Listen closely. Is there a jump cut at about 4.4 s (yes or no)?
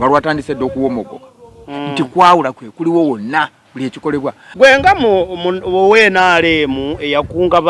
yes